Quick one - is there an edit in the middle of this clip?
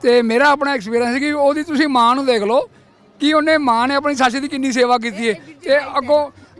no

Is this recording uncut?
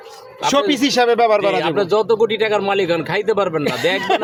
yes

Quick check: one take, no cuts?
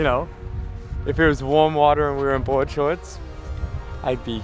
yes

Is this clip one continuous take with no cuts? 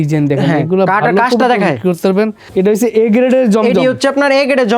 no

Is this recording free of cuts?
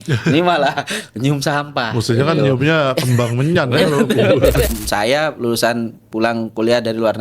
no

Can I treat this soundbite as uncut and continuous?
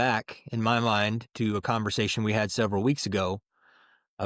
yes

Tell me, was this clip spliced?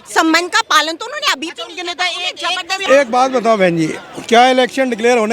yes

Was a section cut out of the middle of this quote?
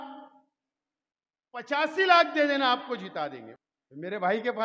yes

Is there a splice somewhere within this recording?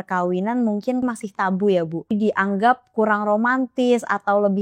yes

